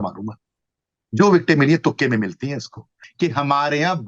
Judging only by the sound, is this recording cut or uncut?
cut